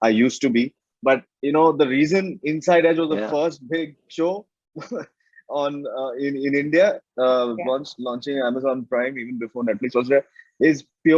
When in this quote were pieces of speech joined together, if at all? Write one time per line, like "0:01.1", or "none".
none